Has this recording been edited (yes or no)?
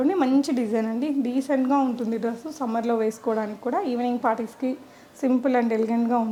no